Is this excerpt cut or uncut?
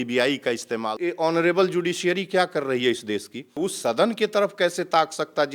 cut